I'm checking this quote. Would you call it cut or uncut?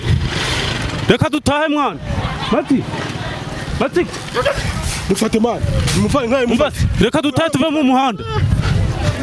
uncut